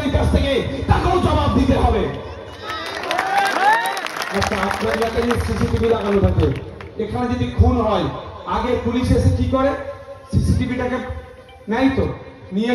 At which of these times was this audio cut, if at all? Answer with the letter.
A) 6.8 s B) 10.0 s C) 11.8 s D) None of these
D